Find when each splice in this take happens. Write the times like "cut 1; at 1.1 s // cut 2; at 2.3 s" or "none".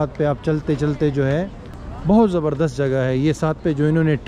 cut 1; at 1.8 s

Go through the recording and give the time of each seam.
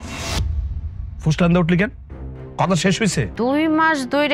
cut 1; at 3.3 s

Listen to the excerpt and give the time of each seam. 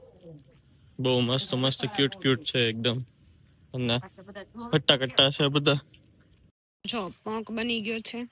cut 1; at 6.7 s

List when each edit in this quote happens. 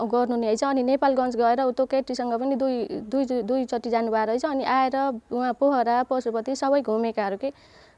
none

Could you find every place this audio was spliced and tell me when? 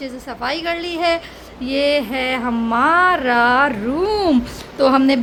none

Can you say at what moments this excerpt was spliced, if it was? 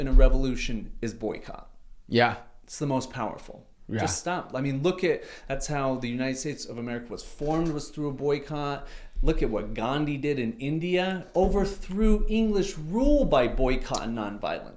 none

